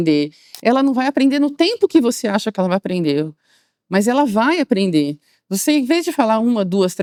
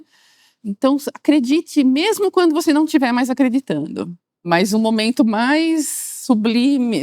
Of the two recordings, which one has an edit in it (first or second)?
second